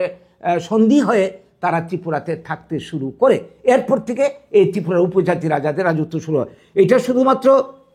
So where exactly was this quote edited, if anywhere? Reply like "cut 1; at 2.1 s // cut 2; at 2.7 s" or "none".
none